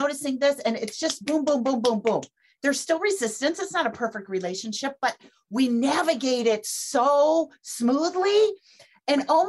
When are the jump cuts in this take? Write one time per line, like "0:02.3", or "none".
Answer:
0:02.4